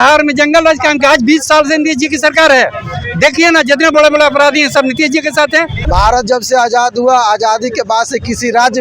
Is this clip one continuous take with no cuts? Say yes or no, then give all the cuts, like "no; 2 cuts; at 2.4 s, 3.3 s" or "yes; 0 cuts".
no; 1 cut; at 5.8 s